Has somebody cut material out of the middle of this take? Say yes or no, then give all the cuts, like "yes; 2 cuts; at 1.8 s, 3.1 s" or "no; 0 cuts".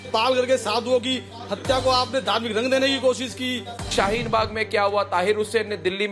no; 0 cuts